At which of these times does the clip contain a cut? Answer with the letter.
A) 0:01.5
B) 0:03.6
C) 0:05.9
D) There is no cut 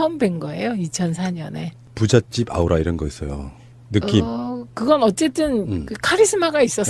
C